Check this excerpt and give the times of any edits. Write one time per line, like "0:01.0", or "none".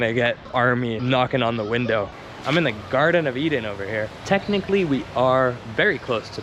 0:02.1